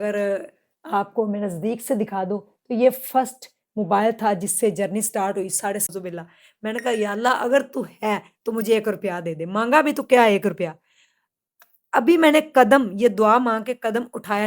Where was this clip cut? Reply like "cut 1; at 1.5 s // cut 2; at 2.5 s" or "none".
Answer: cut 1; at 5.9 s